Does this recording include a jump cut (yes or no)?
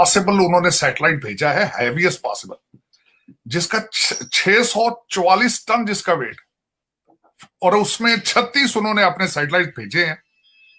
no